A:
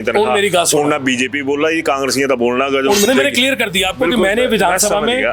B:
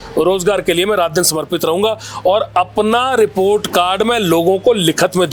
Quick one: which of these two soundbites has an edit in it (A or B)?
A